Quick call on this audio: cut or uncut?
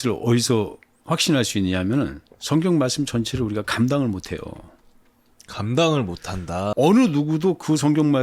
cut